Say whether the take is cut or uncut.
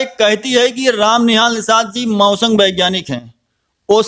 uncut